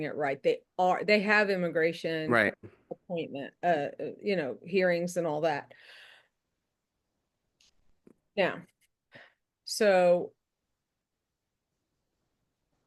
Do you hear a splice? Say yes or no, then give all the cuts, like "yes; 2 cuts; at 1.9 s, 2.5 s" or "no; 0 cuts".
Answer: no; 0 cuts